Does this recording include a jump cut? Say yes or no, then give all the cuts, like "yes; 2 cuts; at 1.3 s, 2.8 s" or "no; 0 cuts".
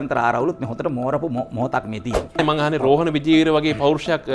yes; 1 cut; at 2.4 s